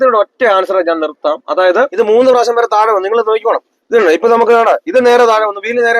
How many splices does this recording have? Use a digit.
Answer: 2